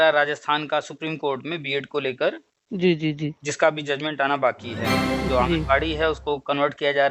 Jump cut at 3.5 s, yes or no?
no